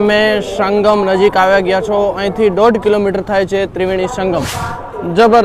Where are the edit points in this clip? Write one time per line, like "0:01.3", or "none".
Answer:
0:04.5

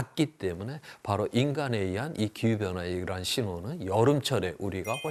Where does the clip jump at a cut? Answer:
none

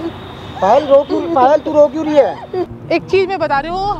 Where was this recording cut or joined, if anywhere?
0:02.7

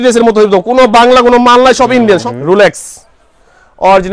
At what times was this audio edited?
0:02.2

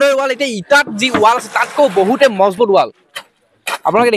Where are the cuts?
none

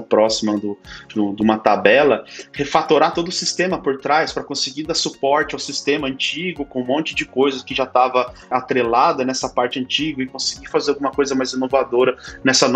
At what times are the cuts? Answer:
0:08.5

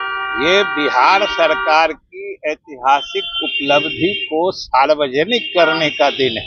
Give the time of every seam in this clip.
none

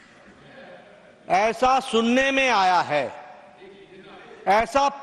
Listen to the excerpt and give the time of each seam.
none

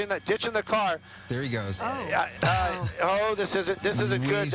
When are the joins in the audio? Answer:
0:02.3

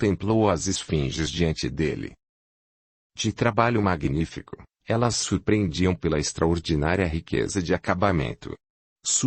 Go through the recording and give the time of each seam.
none

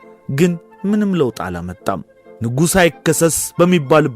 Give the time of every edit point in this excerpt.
0:02.1

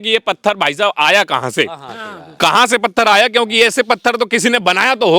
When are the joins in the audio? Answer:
none

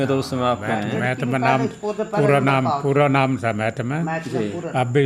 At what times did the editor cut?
none

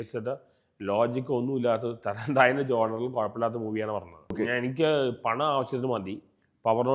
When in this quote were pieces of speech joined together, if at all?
0:04.3

